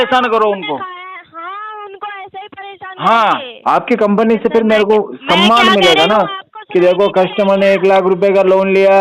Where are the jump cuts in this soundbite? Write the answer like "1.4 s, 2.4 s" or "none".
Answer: 3.5 s

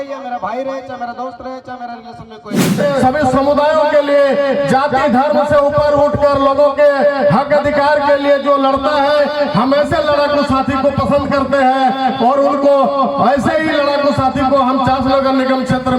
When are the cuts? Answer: 2.8 s

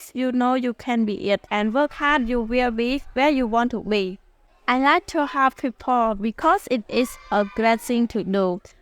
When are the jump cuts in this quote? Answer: 4.5 s

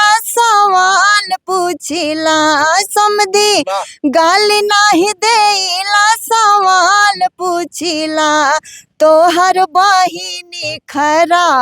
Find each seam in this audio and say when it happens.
none

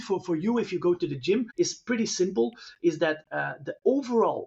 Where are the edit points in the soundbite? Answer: 1.5 s

